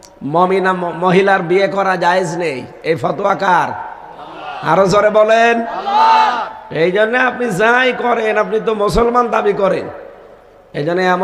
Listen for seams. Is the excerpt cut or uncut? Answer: uncut